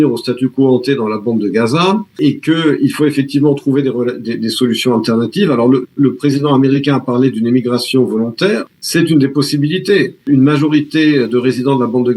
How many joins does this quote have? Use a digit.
3